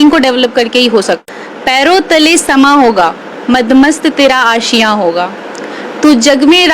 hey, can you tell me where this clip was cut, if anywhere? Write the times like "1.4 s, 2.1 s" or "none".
1.2 s